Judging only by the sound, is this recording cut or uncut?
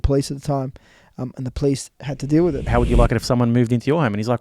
cut